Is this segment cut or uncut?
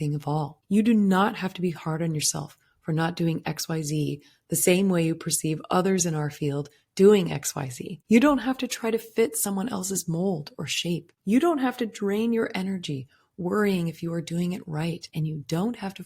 cut